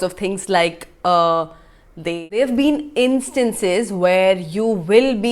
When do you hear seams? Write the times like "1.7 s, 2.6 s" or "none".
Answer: 2.3 s